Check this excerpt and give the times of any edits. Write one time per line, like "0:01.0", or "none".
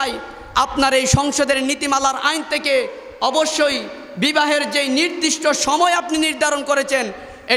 none